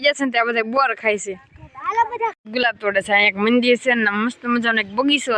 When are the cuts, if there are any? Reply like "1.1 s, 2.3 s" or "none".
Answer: 2.4 s